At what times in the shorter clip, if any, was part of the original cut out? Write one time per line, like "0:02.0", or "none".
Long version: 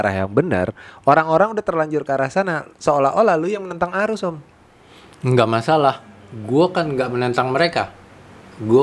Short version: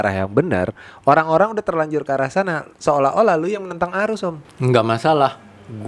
0:04.5

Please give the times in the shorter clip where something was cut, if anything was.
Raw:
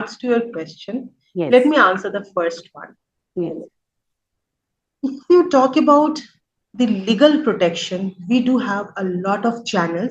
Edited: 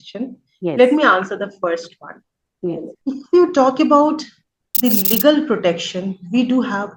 0:02.9

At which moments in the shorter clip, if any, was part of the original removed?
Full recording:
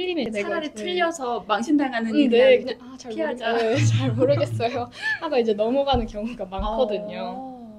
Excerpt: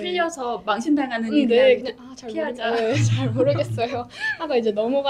none

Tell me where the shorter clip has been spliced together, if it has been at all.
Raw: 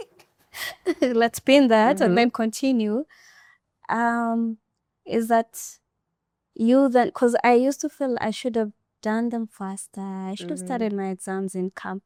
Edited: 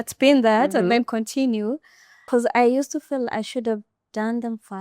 0:02.2

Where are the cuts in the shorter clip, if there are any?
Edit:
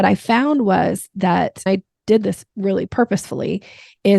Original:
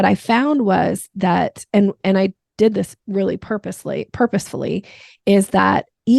0:01.7
0:02.9

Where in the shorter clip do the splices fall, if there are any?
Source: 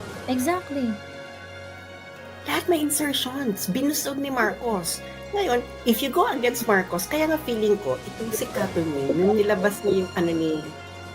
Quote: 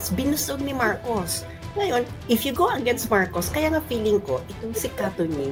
none

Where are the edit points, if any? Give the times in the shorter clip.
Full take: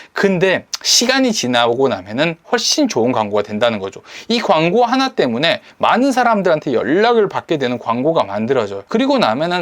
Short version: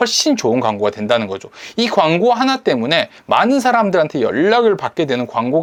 none

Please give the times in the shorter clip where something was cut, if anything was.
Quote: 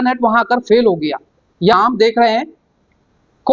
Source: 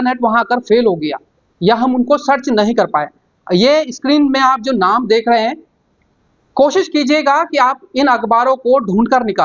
0:01.7

